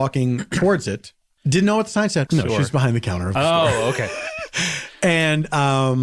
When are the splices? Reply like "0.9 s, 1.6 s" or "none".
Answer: 1.3 s, 2.3 s

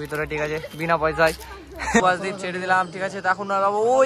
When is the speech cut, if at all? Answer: 2.0 s

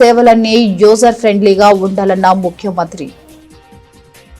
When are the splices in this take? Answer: none

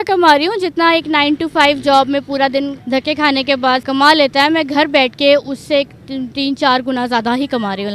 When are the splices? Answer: 2.8 s, 3.8 s

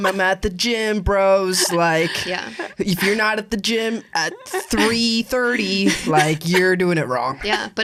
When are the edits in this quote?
none

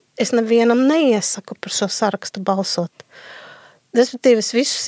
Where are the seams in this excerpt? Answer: none

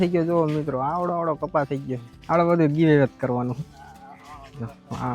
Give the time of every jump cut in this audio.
none

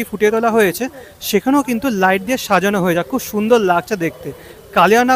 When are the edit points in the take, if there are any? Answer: none

